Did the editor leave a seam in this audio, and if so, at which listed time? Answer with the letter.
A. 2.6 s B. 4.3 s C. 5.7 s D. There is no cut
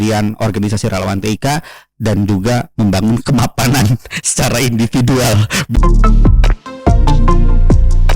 C